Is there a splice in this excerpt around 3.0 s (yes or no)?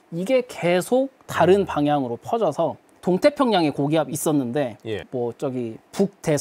no